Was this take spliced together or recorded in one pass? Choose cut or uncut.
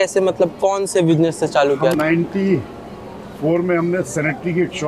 cut